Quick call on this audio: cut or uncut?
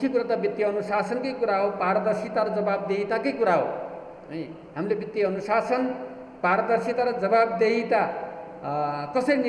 uncut